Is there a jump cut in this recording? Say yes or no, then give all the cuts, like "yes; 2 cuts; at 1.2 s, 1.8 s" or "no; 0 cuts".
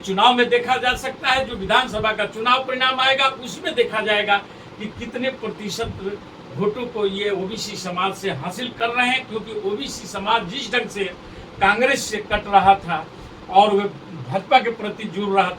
yes; 1 cut; at 8.7 s